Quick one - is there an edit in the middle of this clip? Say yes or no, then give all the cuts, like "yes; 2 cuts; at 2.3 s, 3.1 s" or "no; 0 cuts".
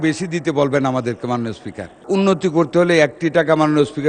yes; 1 cut; at 2.0 s